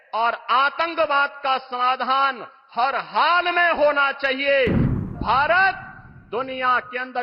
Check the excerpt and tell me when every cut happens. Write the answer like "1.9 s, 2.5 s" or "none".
5.0 s

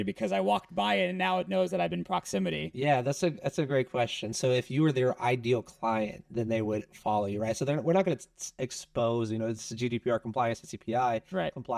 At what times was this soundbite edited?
none

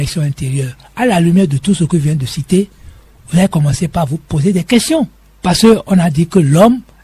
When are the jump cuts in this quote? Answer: 5.2 s

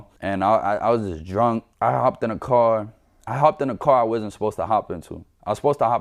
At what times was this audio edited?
1.7 s

